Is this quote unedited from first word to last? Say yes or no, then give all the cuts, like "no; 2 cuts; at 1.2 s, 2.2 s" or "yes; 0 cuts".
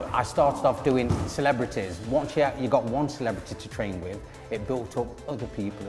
no; 1 cut; at 1.1 s